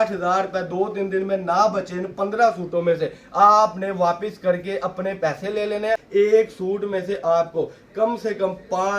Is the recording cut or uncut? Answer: cut